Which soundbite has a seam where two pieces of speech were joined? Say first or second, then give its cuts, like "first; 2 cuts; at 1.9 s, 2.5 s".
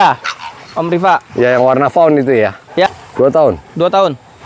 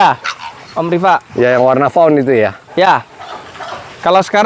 first; 1 cut; at 2.9 s